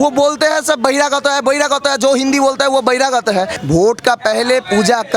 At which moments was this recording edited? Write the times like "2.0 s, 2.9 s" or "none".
3.6 s